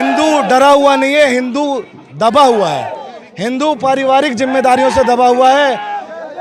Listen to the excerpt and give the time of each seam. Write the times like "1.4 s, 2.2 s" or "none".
none